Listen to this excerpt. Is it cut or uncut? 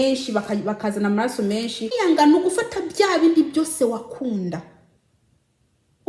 cut